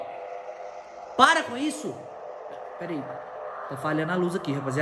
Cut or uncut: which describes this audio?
uncut